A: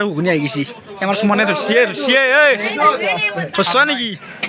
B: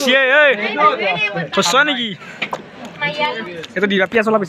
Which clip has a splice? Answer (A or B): B